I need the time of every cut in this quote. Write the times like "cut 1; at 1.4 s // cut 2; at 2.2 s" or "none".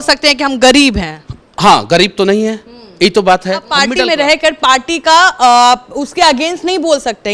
cut 1; at 3.8 s

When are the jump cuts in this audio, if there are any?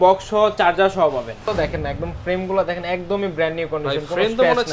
cut 1; at 1.5 s

